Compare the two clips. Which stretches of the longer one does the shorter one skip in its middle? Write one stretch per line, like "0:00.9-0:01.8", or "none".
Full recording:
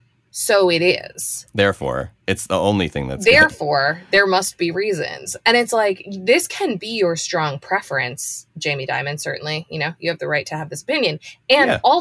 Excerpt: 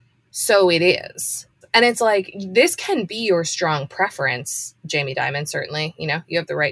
0:01.4-0:05.1